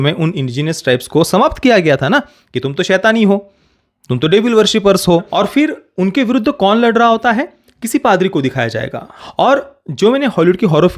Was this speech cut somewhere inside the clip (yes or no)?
yes